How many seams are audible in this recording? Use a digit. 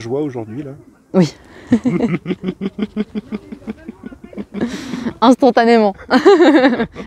0